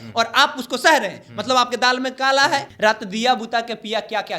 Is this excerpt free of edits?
no; 1 cut; at 2.4 s

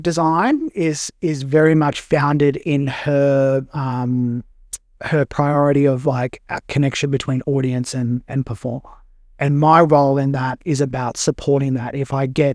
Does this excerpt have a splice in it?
no; 0 cuts

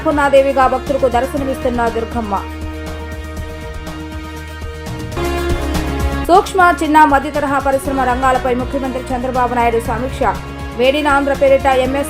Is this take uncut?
yes; 0 cuts

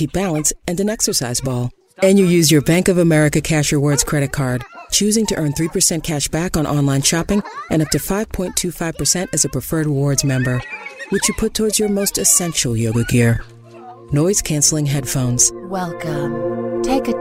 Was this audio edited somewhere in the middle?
no; 0 cuts

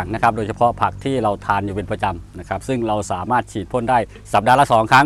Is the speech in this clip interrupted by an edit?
no; 0 cuts

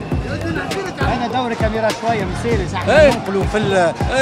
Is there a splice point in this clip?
yes; 1 cut; at 1.0 s

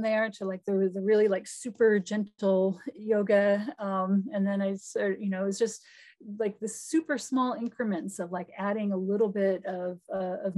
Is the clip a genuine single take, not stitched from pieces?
yes; 0 cuts

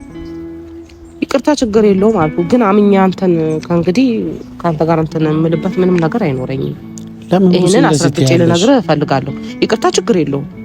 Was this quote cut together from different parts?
yes; 1 cut; at 1.2 s

